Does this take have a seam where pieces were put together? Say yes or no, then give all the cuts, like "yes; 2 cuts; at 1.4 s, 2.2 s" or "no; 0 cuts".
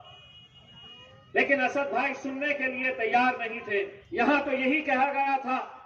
yes; 1 cut; at 4.0 s